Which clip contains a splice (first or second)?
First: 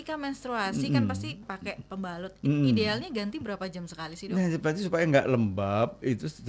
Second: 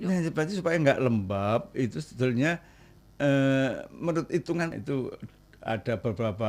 second